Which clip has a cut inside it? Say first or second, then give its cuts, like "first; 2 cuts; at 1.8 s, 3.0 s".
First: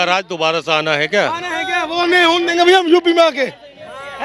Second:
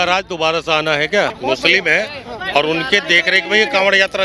second; 1 cut; at 1.3 s